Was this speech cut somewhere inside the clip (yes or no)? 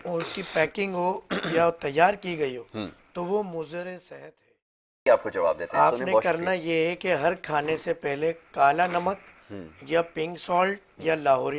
yes